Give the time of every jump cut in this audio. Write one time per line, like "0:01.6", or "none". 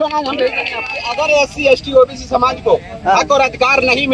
0:01.1